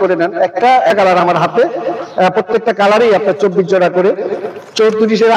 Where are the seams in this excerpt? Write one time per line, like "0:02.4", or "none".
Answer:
0:00.9